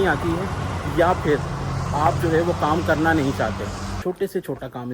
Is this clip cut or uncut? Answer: cut